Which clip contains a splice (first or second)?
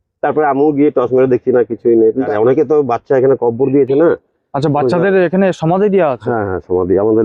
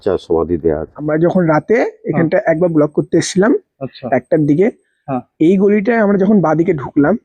second